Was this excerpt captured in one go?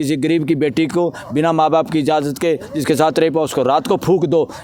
yes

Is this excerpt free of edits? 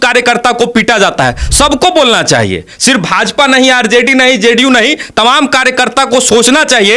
yes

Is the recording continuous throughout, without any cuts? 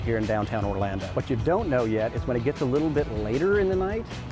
yes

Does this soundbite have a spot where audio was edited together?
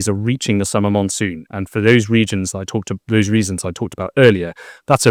no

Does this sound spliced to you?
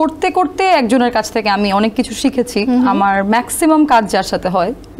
no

